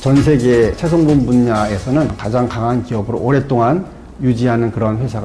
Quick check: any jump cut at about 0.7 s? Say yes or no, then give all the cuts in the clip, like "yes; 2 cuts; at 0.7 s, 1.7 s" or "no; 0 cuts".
yes; 2 cuts; at 0.7 s, 2.2 s